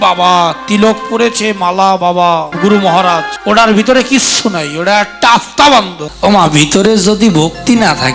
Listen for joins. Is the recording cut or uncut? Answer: cut